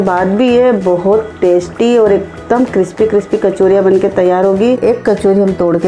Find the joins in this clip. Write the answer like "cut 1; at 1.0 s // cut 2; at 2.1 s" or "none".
cut 1; at 4.8 s